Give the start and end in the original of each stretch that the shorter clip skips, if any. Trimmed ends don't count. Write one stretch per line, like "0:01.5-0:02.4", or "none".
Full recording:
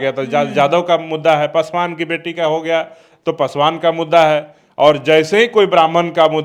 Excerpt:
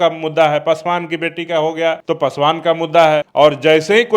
0:02.9-0:03.2
0:04.5-0:04.7